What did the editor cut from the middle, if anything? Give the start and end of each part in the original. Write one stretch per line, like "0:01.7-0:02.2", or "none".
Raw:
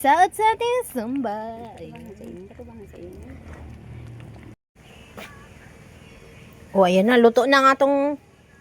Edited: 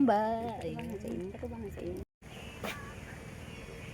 0:03.2-0:04.6